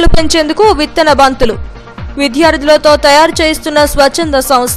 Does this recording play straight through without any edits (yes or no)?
yes